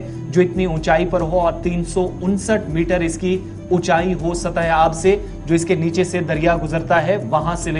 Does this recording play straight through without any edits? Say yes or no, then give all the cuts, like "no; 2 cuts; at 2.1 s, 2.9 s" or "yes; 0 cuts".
yes; 0 cuts